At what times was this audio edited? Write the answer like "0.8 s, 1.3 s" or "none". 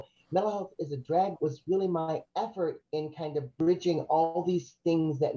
1.3 s, 2.3 s

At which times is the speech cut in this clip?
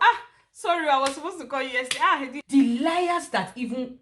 2.3 s

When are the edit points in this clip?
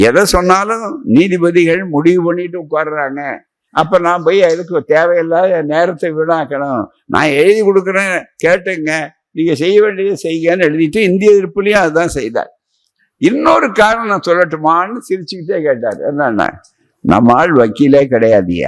none

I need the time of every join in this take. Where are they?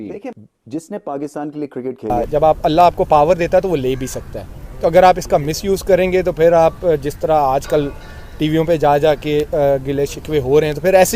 2.1 s

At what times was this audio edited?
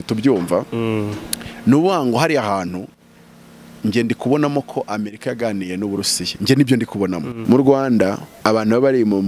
7.3 s, 8.3 s

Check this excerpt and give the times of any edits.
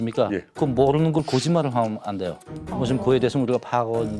none

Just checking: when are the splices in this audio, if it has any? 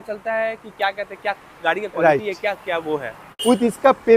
3.3 s

